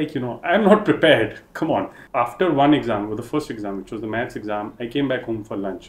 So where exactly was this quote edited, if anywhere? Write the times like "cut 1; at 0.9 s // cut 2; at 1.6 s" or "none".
cut 1; at 2.0 s